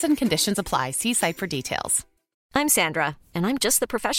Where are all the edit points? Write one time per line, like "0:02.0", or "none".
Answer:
0:02.3